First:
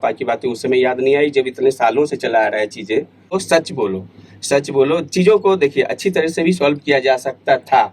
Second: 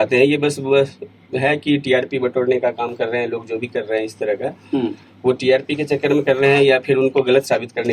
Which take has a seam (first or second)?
first